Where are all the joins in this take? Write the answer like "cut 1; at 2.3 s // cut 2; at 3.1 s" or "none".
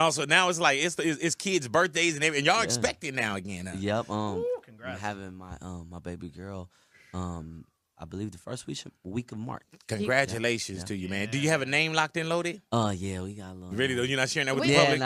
cut 1; at 10.5 s

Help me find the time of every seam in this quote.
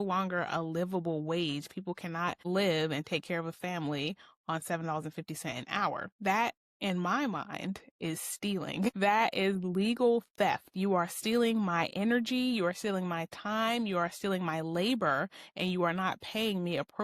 cut 1; at 2.4 s // cut 2; at 6.1 s

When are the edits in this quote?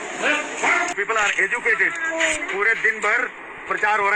cut 1; at 0.9 s

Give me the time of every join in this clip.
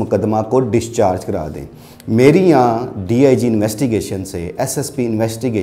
none

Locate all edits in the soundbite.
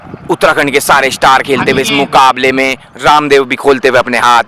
cut 1; at 2.9 s

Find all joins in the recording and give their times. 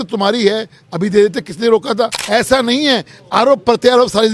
cut 1; at 2.2 s

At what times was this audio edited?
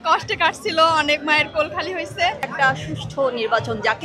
cut 1; at 2.5 s

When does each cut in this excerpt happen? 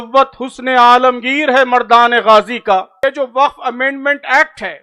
cut 1; at 3.0 s

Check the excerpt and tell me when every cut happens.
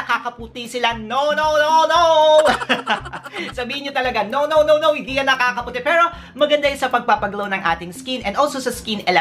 none

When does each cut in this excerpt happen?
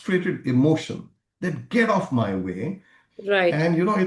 none

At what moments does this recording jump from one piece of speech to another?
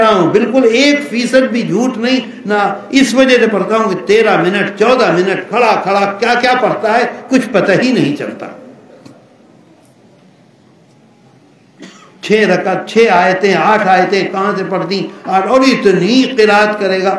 none

